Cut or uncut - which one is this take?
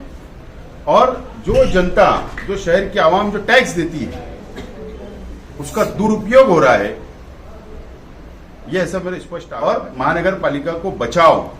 cut